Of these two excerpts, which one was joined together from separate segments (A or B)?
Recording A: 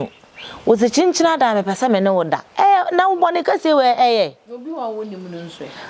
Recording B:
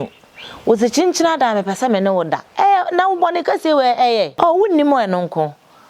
B